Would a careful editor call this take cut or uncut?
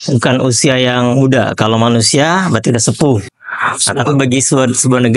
uncut